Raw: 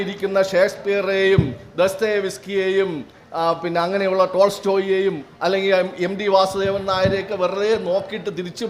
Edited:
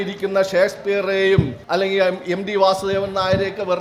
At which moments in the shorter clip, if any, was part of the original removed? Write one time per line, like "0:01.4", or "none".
0:01.6